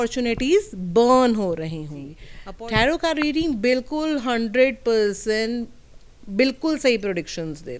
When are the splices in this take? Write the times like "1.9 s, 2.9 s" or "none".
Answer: 2.3 s